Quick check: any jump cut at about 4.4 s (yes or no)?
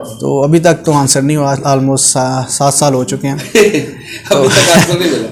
no